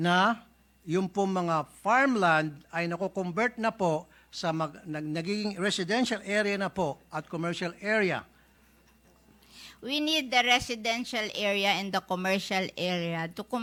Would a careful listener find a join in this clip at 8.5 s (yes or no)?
no